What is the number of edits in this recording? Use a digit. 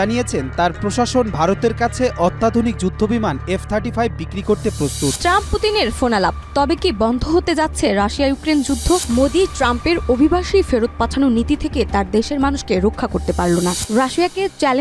3